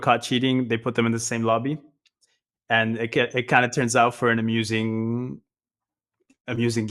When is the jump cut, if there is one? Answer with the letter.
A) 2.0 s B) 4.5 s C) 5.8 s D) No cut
D